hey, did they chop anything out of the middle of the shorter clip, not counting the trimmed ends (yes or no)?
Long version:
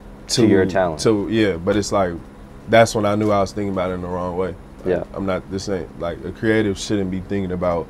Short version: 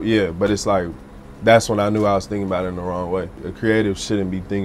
yes